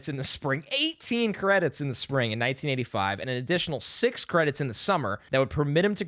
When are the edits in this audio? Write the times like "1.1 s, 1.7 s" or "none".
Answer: 5.2 s